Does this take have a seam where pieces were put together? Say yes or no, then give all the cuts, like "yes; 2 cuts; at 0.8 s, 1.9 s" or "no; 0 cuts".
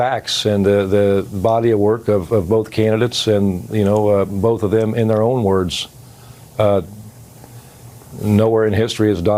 no; 0 cuts